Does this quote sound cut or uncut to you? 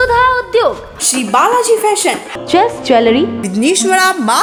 uncut